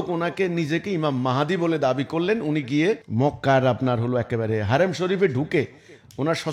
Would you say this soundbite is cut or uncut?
cut